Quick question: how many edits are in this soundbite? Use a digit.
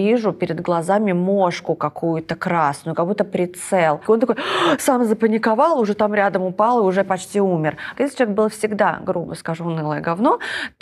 2